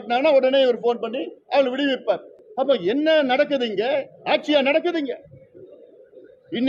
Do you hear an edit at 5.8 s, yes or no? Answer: no